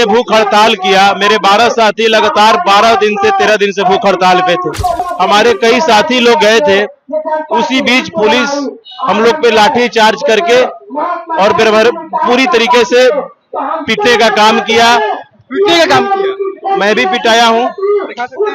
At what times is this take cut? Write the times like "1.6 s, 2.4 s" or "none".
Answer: 5.0 s